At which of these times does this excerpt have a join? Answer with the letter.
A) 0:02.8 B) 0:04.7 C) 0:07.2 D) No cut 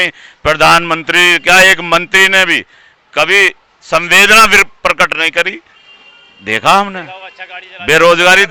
D